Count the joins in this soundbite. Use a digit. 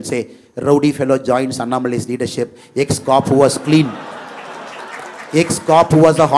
0